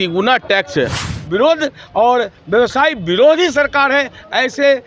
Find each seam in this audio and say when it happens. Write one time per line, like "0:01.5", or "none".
0:01.0

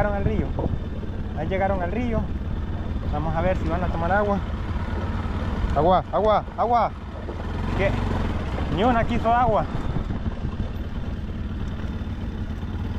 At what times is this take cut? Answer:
none

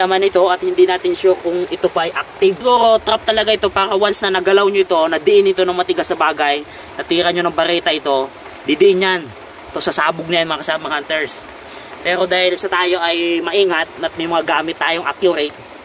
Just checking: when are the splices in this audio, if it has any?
0:02.6

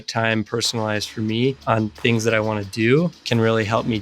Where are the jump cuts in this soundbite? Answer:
0:01.6
0:03.2

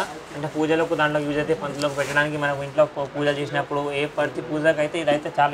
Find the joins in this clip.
none

